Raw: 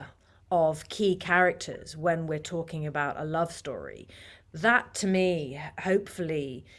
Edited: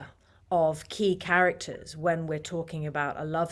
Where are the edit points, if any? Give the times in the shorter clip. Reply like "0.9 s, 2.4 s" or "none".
none